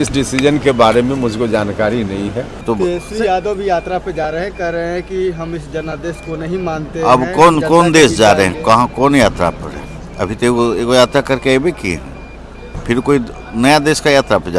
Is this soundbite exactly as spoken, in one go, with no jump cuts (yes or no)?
no